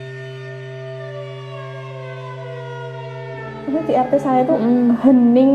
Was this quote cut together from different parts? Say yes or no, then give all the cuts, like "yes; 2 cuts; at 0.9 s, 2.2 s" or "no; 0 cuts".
yes; 1 cut; at 3.4 s